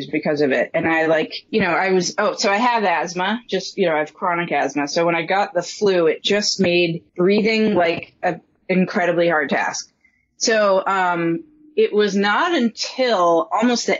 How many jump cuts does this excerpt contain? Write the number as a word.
two